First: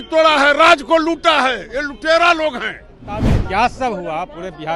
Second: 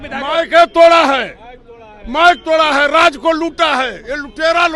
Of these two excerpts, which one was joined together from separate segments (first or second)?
first